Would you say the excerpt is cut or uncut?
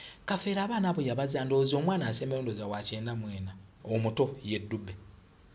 cut